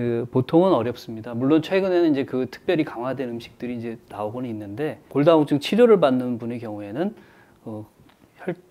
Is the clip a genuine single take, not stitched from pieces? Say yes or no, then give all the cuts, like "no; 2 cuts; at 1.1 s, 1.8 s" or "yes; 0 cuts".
yes; 0 cuts